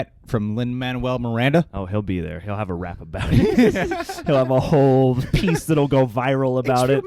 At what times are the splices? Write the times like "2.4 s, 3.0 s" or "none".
none